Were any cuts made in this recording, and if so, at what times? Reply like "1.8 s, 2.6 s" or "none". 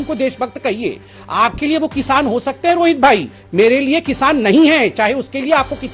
none